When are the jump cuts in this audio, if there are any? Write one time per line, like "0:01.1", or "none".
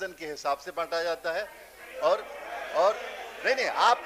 none